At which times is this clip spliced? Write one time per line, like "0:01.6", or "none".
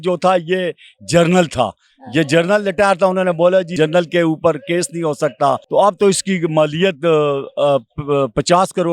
0:03.7
0:05.6